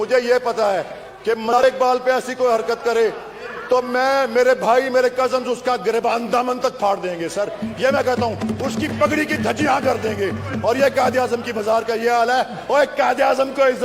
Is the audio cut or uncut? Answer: cut